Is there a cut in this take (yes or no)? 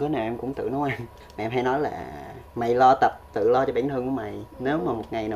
yes